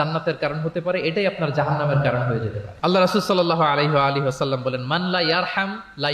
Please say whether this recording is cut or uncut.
uncut